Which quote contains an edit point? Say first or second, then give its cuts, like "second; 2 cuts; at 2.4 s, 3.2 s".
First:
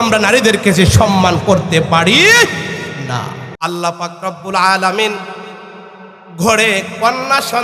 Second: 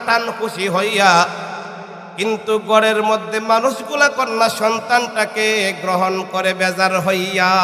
first; 1 cut; at 3.4 s